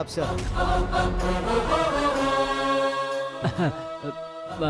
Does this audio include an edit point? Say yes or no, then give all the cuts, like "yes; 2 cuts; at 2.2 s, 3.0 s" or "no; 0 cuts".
yes; 1 cut; at 3.3 s